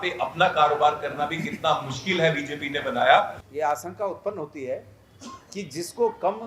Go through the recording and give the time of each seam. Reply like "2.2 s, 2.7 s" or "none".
3.4 s